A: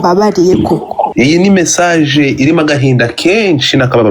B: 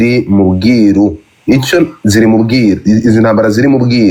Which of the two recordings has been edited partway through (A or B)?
A